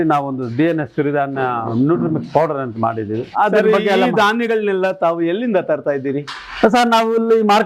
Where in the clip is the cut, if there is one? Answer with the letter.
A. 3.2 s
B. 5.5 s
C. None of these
C